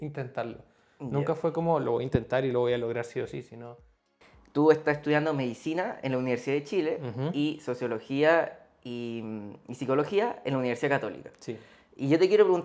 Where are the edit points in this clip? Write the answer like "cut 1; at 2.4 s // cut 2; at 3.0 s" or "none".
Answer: cut 1; at 4.2 s